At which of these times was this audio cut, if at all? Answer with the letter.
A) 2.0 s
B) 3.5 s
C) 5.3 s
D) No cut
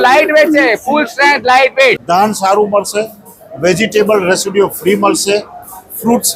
A